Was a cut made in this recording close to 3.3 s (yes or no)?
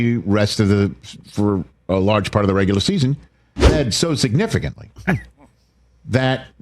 yes